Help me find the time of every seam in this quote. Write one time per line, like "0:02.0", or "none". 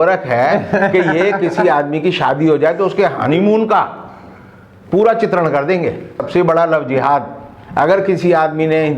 0:06.2